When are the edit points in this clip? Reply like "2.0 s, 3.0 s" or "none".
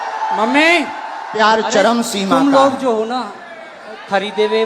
1.3 s